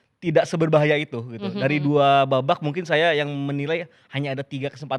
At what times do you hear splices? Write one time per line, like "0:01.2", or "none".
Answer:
none